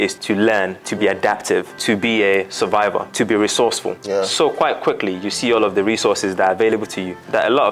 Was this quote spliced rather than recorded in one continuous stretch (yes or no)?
yes